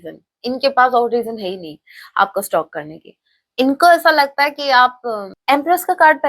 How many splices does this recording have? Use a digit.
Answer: 1